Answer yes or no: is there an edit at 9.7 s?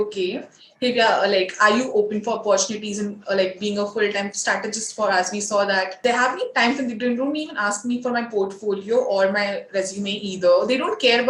no